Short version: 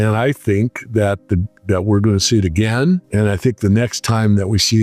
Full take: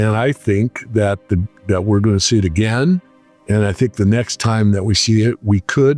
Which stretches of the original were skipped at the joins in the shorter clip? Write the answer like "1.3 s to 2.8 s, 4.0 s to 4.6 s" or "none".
3.1 s to 3.4 s